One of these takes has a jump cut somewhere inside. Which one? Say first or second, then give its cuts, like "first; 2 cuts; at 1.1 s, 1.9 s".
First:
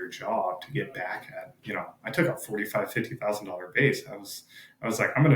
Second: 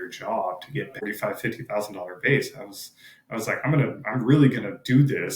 second; 1 cut; at 0.9 s